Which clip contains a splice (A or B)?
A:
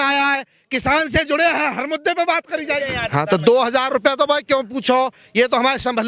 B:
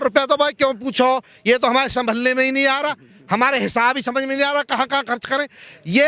A